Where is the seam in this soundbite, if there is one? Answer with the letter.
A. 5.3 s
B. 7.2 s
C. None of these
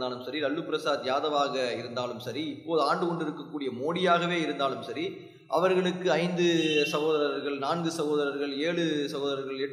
C